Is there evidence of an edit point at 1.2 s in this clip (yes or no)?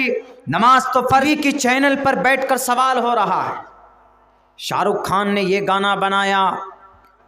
yes